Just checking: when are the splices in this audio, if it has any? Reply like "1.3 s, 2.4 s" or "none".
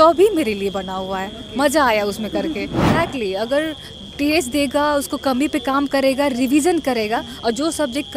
2.8 s